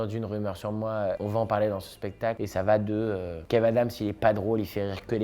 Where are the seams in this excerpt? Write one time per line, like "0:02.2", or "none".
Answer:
0:01.2
0:02.4